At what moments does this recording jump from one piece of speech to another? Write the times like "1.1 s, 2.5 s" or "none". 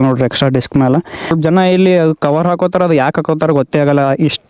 1.3 s